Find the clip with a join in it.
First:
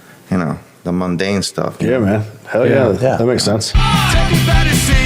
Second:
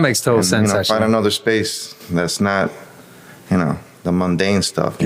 first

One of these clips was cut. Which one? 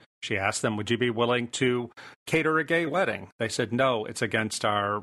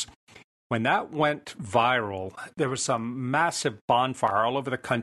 second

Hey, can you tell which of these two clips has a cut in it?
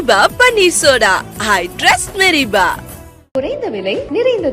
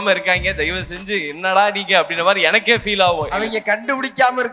second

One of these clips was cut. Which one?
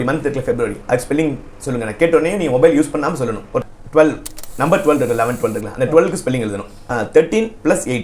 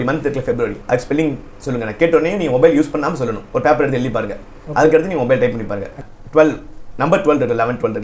first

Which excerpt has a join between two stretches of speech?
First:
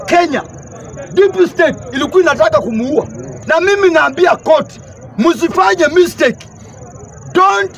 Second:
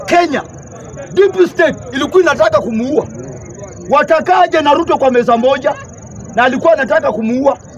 first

